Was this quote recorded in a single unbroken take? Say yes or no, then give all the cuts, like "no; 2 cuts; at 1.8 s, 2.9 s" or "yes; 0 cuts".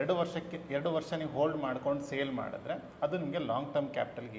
yes; 0 cuts